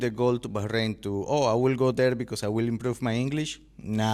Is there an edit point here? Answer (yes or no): no